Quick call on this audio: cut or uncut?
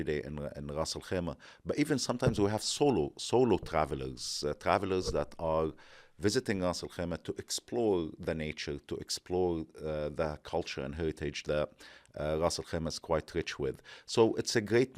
uncut